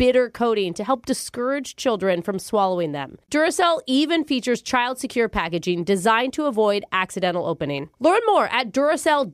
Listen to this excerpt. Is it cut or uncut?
uncut